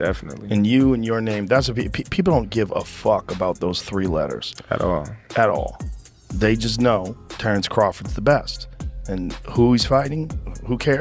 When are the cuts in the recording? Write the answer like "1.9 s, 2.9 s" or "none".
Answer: none